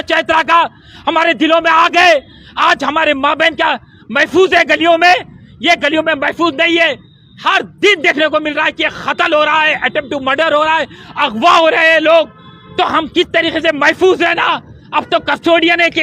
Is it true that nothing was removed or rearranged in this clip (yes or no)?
yes